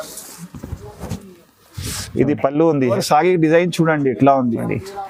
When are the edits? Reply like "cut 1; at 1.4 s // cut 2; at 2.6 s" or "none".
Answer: cut 1; at 3.0 s